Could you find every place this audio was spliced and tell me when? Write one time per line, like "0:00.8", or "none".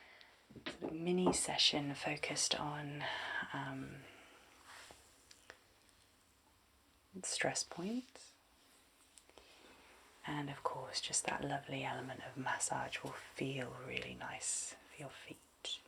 none

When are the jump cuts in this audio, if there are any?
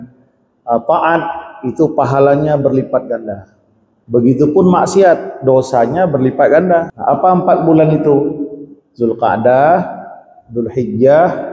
0:06.9

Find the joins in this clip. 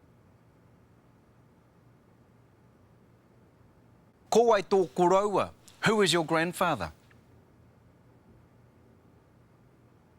0:03.9
0:06.9

